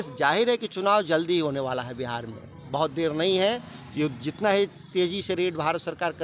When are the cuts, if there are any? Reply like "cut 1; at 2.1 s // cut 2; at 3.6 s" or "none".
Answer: none

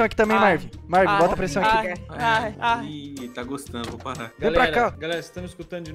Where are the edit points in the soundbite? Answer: none

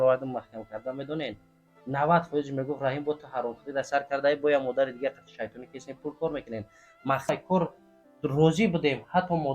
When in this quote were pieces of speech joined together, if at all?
cut 1; at 7.3 s

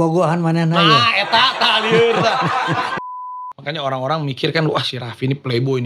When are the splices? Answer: cut 1; at 3.1 s

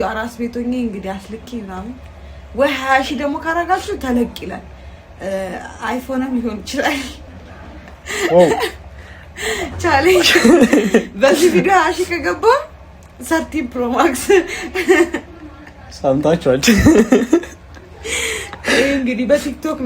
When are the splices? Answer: none

